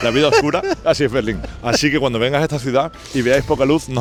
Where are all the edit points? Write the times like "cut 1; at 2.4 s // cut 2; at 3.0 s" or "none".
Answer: none